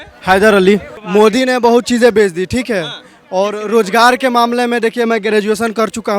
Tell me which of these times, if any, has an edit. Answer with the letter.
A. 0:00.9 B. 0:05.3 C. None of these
A